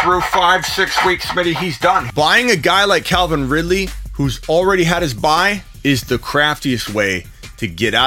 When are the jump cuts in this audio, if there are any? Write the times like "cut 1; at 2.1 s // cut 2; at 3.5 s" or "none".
cut 1; at 2.1 s

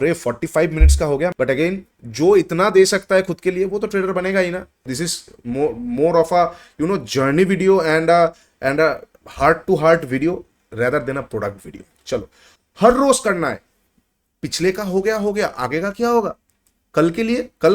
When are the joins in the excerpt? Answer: cut 1; at 1.3 s // cut 2; at 4.8 s // cut 3; at 12.5 s

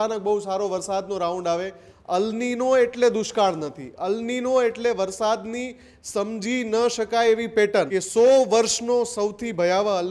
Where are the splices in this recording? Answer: cut 1; at 8.0 s

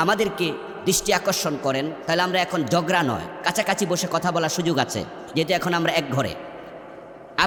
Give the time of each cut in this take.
none

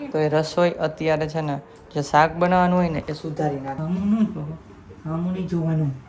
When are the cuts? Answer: cut 1; at 3.7 s

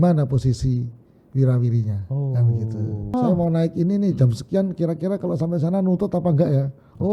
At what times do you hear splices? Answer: cut 1; at 3.1 s

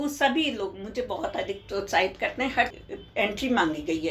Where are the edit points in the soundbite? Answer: cut 1; at 2.7 s

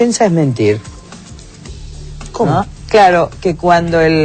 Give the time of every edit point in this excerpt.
none

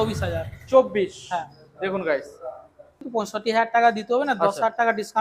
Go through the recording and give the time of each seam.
cut 1; at 3.0 s

